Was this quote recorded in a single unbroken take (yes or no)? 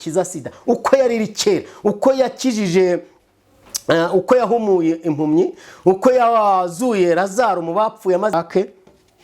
no